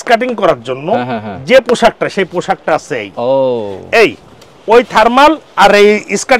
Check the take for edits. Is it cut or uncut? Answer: uncut